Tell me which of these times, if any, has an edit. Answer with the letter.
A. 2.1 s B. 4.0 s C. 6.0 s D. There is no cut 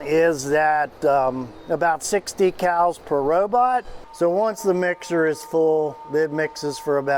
B